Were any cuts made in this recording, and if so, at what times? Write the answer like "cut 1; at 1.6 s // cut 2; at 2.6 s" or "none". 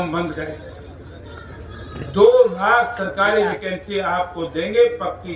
none